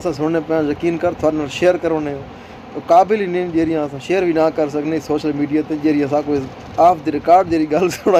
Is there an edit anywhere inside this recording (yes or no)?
no